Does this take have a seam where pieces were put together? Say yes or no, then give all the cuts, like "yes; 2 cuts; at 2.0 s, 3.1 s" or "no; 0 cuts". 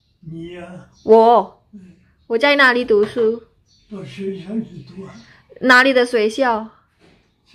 no; 0 cuts